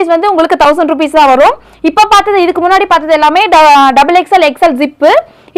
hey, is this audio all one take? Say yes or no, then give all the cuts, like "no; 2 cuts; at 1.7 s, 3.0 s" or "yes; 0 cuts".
yes; 0 cuts